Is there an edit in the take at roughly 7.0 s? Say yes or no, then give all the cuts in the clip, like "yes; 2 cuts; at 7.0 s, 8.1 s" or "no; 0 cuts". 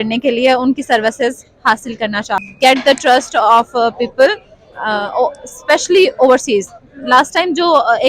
no; 1 cut; at 2.4 s